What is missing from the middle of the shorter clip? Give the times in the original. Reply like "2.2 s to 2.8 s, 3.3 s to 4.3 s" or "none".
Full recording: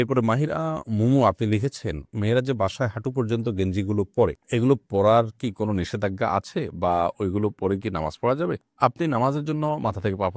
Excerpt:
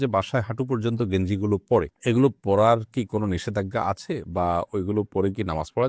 none